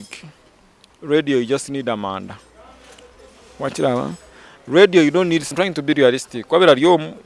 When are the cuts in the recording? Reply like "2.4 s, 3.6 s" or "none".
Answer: 5.5 s